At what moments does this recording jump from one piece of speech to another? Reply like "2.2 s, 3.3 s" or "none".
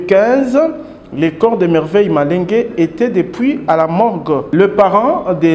4.5 s